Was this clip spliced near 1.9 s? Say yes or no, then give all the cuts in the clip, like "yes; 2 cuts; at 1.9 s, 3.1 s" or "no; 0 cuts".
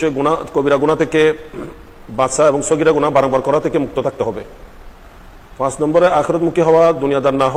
no; 0 cuts